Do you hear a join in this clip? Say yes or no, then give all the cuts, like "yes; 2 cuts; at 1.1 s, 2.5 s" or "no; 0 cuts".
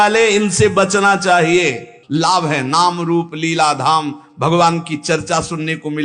yes; 1 cut; at 1.9 s